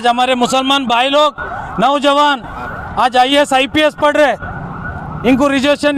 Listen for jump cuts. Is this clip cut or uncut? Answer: uncut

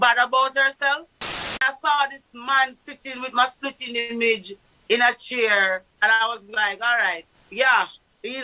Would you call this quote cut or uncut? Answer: cut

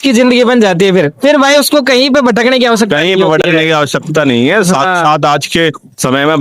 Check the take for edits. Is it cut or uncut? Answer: uncut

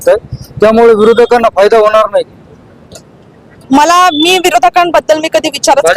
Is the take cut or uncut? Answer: uncut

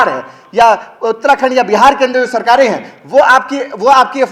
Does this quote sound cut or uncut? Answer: uncut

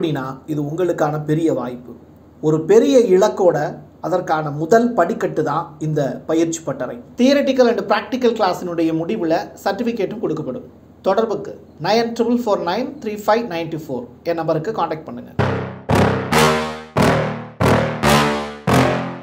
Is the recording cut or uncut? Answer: cut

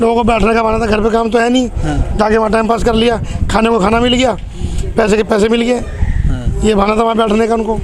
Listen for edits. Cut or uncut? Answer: uncut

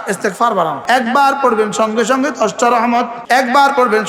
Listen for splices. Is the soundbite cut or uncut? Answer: cut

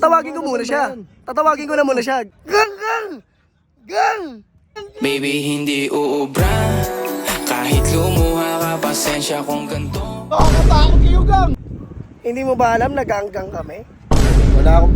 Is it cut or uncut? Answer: cut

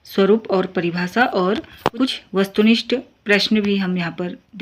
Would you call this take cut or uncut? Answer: cut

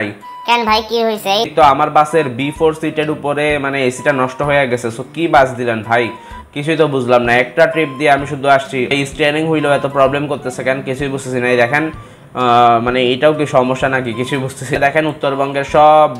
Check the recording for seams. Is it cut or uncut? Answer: cut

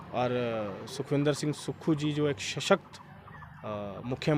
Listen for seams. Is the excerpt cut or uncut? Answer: uncut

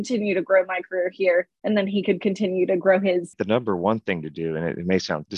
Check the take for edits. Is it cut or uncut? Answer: cut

